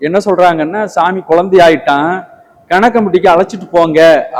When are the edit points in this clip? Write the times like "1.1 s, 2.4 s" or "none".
none